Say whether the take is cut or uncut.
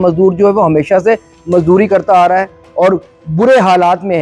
uncut